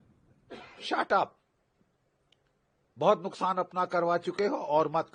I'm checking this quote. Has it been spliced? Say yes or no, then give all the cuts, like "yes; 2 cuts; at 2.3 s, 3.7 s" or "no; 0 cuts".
no; 0 cuts